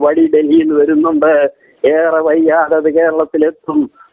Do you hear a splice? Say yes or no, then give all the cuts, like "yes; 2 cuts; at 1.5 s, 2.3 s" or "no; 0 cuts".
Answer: no; 0 cuts